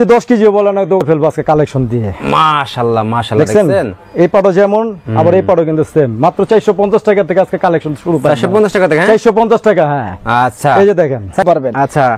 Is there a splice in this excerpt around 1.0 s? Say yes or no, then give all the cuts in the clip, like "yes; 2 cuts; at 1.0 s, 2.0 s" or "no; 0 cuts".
yes; 2 cuts; at 1.0 s, 11.4 s